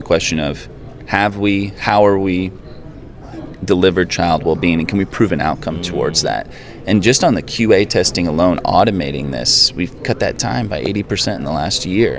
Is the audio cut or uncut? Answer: uncut